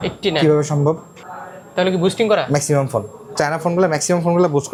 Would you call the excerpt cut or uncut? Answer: uncut